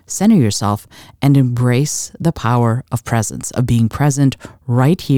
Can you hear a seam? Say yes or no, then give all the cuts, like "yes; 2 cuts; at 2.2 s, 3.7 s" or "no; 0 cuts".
no; 0 cuts